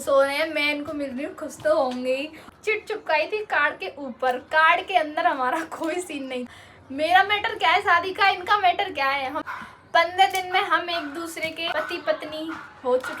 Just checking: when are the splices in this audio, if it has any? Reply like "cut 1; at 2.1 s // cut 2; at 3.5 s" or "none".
cut 1; at 2.5 s // cut 2; at 6.4 s // cut 3; at 9.4 s // cut 4; at 11.7 s